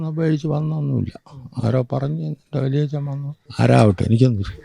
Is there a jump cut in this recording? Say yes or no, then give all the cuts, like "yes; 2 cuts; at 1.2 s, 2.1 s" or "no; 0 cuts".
yes; 1 cut; at 3.4 s